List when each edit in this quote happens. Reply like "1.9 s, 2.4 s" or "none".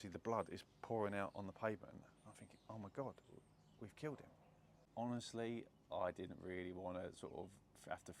4.8 s